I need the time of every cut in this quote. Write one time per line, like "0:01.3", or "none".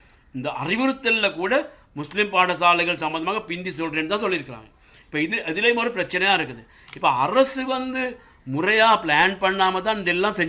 none